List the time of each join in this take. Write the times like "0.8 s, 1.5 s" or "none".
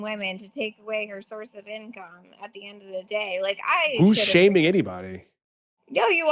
none